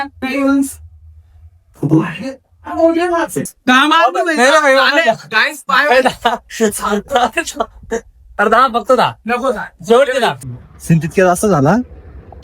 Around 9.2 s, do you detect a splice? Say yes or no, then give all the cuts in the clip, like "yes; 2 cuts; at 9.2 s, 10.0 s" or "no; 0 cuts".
no; 2 cuts; at 3.6 s, 10.5 s